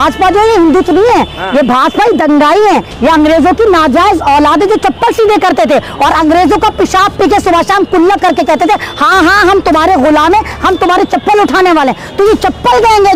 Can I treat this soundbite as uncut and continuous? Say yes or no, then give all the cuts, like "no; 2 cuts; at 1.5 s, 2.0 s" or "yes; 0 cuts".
yes; 0 cuts